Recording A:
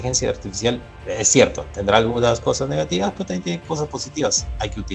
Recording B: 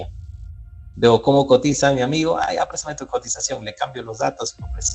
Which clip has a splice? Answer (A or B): A